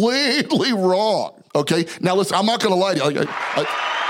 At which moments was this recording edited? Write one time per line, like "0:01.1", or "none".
0:01.4